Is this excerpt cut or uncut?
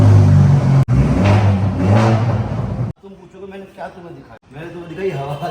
cut